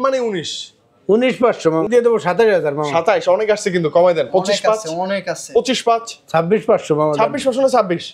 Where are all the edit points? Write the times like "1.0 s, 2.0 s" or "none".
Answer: 1.9 s